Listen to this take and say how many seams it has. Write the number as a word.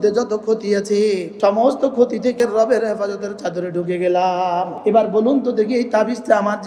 three